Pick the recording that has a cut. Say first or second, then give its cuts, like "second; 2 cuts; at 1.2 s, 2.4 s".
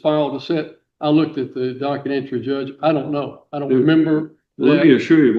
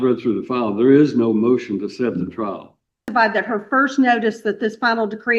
second; 1 cut; at 3.0 s